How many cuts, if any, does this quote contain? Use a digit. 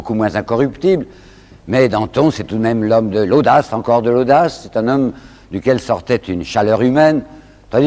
1